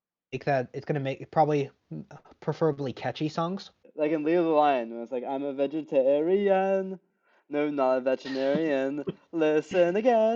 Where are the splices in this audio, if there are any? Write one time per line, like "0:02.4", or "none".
0:03.8